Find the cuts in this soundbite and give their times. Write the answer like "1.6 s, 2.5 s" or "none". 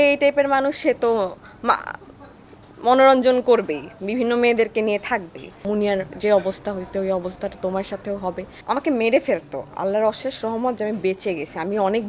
5.5 s, 8.5 s